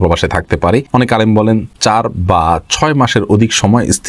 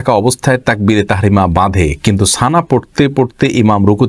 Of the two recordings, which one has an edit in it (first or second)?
first